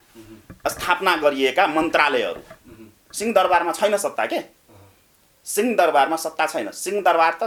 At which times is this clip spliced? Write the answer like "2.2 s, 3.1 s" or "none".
none